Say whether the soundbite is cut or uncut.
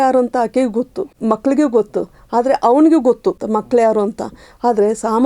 cut